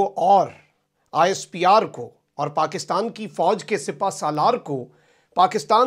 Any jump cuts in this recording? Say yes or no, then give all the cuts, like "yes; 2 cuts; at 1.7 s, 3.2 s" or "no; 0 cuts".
no; 0 cuts